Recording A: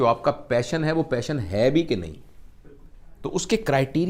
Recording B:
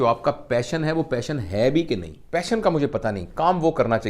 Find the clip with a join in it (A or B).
B